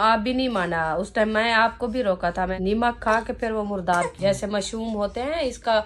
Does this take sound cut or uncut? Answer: cut